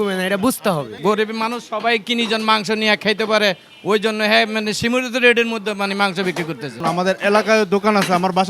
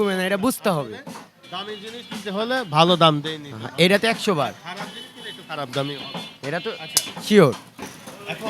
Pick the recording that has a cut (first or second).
first